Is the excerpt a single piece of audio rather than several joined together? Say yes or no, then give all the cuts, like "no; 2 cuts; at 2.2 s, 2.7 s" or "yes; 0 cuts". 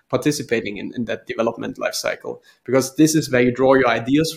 yes; 0 cuts